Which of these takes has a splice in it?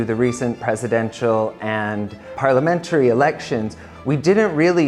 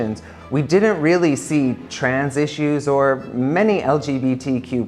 first; 1 cut; at 2.4 s

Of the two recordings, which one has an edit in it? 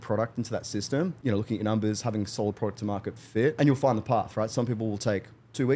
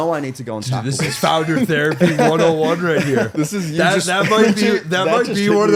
first; 2 cuts; at 1.2 s, 3.5 s

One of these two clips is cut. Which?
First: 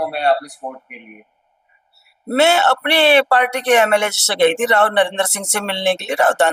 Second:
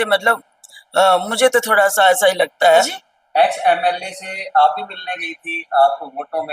second; 1 cut; at 2.9 s

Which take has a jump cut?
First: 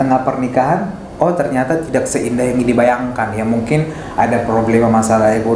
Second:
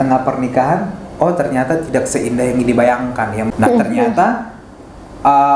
second; 1 cut; at 3.5 s

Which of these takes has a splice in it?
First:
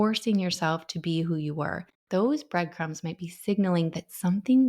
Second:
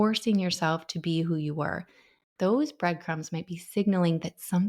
first; 1 cut; at 1.9 s

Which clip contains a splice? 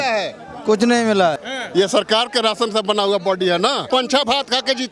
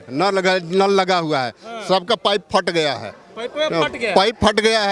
first; 2 cuts; at 1.5 s, 3.9 s

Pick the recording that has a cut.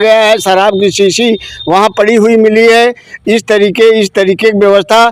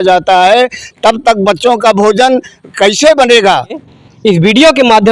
second; 1 cut; at 3.9 s

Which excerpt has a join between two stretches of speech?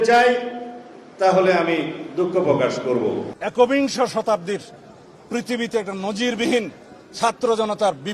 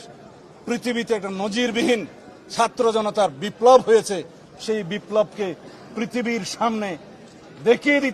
first; 1 cut; at 3.3 s

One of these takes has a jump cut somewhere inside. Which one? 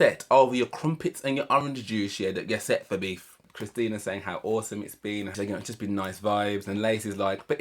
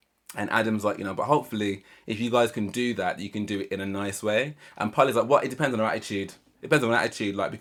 first; 2 cuts; at 3.4 s, 5.3 s

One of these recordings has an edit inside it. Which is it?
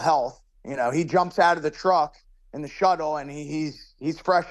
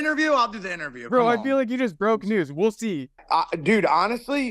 second; 1 cut; at 3.2 s

